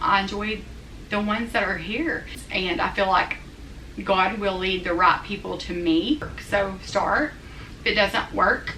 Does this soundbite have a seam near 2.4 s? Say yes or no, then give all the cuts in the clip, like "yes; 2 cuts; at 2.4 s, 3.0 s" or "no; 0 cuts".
yes; 2 cuts; at 2.4 s, 6.3 s